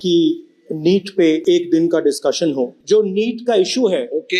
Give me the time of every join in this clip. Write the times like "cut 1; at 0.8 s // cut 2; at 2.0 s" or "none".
cut 1; at 1.4 s // cut 2; at 2.8 s